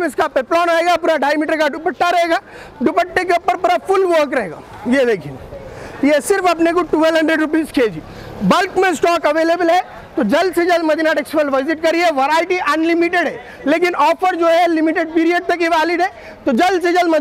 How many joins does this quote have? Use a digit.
0